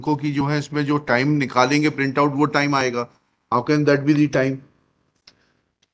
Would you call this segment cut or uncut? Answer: uncut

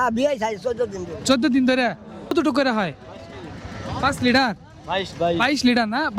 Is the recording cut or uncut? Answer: cut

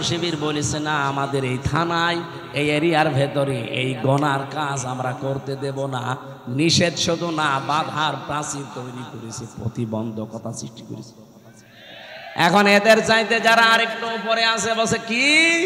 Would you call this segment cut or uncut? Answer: uncut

